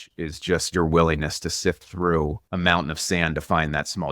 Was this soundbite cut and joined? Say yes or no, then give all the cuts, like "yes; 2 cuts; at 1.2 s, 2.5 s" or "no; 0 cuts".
yes; 1 cut; at 2.4 s